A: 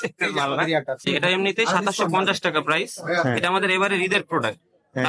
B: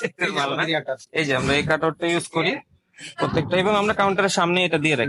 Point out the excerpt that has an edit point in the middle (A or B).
A